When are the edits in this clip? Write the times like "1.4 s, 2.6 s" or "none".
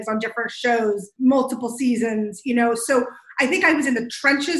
1.1 s